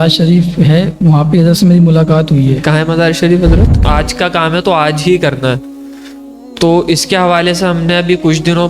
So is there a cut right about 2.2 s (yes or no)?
no